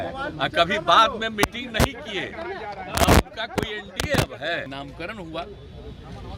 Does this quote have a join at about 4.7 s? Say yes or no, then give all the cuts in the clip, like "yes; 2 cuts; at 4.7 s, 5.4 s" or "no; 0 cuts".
yes; 1 cut; at 4.7 s